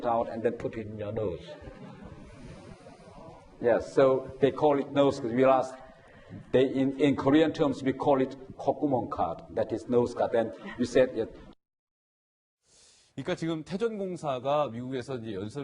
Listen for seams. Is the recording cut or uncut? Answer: cut